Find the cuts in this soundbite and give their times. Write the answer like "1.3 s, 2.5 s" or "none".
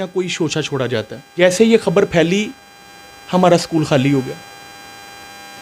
1.4 s